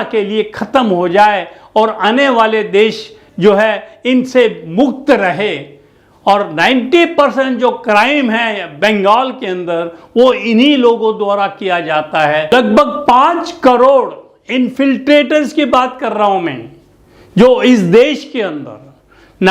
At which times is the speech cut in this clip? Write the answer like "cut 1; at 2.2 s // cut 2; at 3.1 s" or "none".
cut 1; at 12.5 s

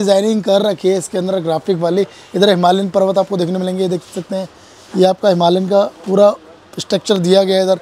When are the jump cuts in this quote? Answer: none

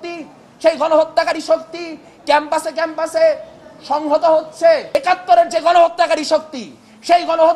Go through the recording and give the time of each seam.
cut 1; at 4.9 s

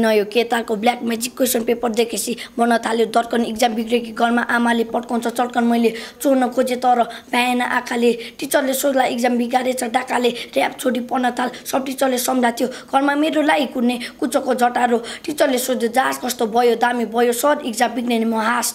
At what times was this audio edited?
none

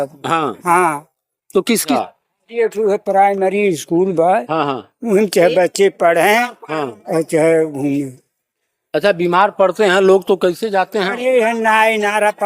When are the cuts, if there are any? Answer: cut 1; at 2.0 s

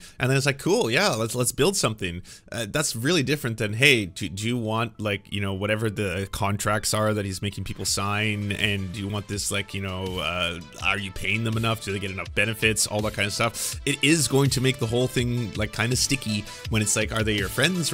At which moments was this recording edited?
none

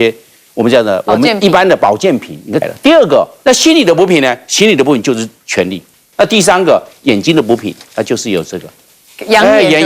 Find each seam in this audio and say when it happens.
cut 1; at 2.6 s // cut 2; at 3.3 s // cut 3; at 6.0 s

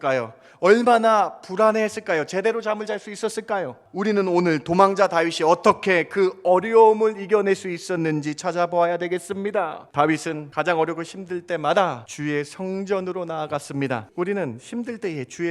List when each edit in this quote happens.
cut 1; at 3.8 s // cut 2; at 9.8 s // cut 3; at 10.4 s // cut 4; at 12.1 s // cut 5; at 14.1 s

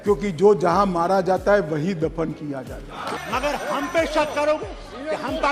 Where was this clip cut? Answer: cut 1; at 3.1 s

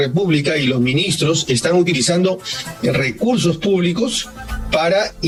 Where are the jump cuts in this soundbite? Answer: none

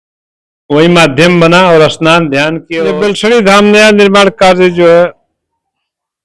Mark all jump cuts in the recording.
cut 1; at 2.6 s

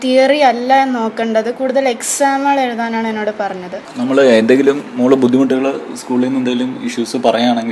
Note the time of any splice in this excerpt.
cut 1; at 3.8 s

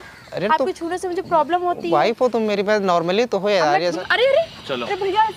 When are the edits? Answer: cut 1; at 4.0 s

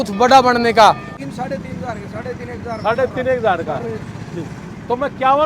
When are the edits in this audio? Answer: cut 1; at 1.1 s

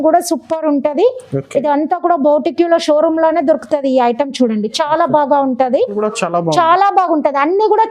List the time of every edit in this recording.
cut 1; at 5.9 s

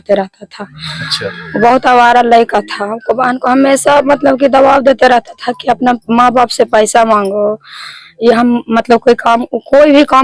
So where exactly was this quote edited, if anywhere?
none

